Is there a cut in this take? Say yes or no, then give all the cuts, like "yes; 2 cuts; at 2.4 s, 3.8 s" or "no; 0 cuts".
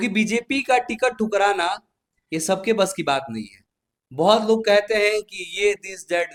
no; 0 cuts